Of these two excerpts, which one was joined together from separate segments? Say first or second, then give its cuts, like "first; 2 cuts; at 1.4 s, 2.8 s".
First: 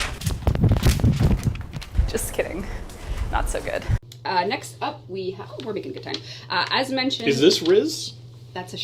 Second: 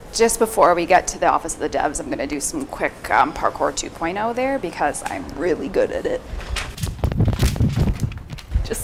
first; 1 cut; at 4.1 s